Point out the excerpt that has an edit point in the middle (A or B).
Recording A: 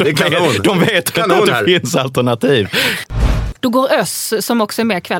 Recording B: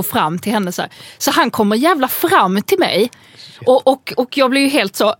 A